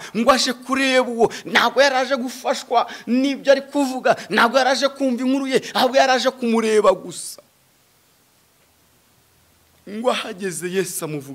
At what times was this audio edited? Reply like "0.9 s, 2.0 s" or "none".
none